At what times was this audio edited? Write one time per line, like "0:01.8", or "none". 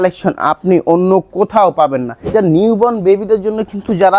0:02.3